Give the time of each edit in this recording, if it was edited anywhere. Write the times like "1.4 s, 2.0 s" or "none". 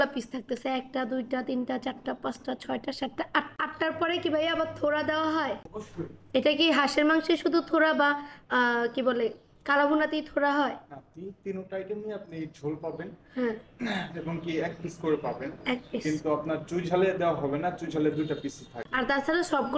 none